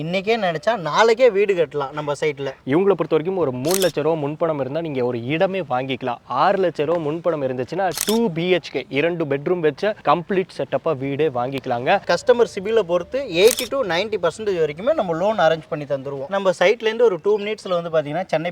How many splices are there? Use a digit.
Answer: 3